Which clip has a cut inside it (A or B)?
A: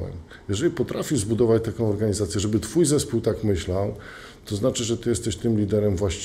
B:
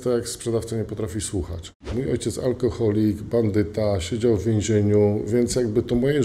B